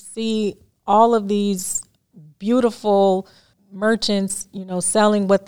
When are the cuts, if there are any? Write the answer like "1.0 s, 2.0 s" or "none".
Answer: 3.5 s

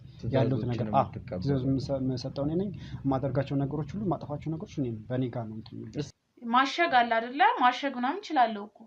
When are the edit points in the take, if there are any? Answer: 6.1 s

